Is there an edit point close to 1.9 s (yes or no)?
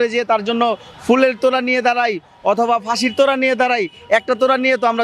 no